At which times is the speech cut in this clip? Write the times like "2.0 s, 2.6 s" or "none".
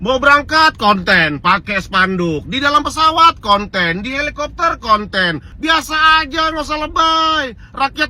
5.5 s